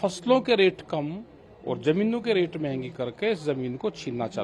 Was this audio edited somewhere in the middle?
no; 0 cuts

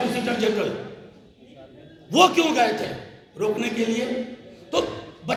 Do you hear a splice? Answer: no; 0 cuts

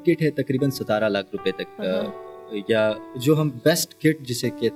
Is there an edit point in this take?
no; 0 cuts

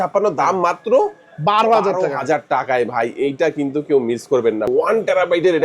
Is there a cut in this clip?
yes; 1 cut; at 4.7 s

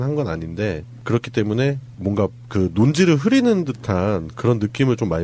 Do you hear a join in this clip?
yes; 1 cut; at 4.1 s

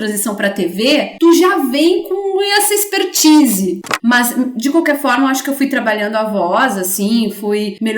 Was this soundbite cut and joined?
yes; 2 cuts; at 1.1 s, 3.9 s

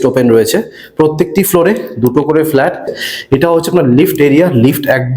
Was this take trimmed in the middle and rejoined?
yes; 1 cut; at 2.9 s

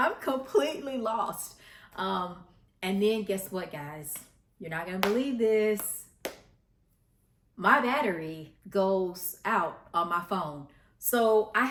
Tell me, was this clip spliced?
no; 0 cuts

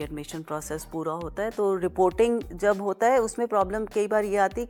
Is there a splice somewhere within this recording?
no; 0 cuts

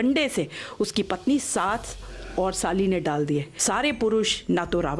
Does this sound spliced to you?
yes; 1 cut; at 3.5 s

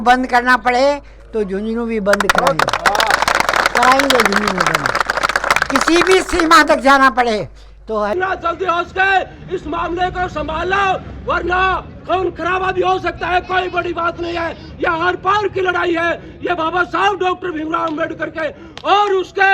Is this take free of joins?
no; 1 cut; at 8.1 s

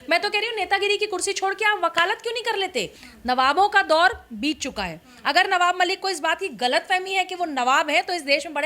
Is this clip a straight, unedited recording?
no; 1 cut; at 3.0 s

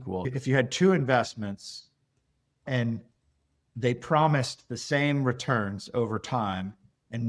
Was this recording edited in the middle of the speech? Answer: yes; 1 cut; at 2.6 s

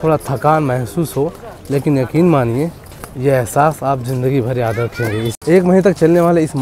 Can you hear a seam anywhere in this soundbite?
yes; 1 cut; at 5.3 s

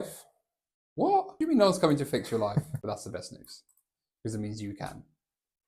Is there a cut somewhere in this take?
yes; 2 cuts; at 1.3 s, 2.7 s

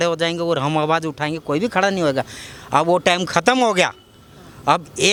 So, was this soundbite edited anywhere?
no; 0 cuts

